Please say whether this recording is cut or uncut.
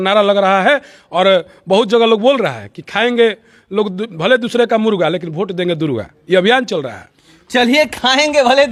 uncut